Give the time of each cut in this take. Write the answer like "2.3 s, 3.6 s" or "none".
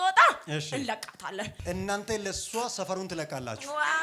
1.6 s

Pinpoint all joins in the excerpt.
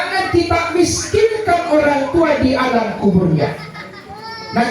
none

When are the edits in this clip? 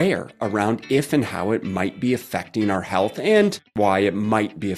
3.6 s

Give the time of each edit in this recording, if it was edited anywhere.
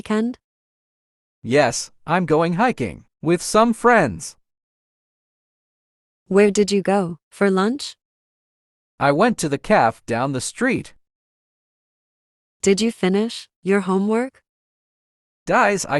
none

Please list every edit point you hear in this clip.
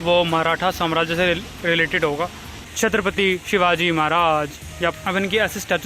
2.5 s, 4.9 s

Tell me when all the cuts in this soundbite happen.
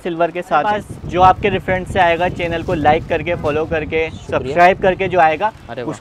0.9 s

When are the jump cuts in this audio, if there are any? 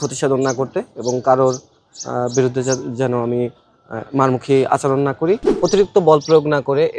5.5 s

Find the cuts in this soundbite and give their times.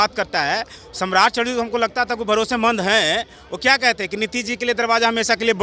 none

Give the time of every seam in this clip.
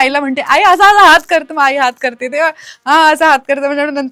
none

